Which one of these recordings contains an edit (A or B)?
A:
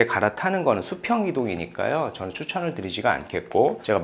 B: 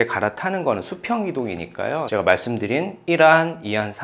B